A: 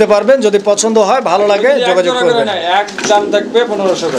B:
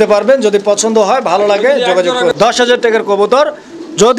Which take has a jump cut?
B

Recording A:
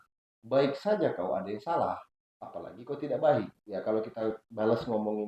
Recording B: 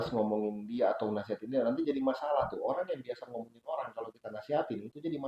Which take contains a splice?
A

